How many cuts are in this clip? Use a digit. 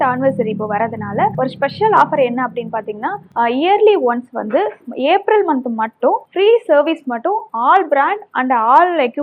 0